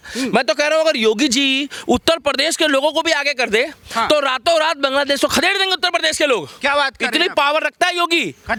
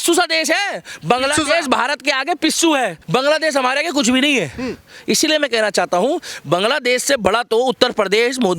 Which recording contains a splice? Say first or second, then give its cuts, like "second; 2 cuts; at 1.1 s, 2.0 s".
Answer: second; 1 cut; at 3.0 s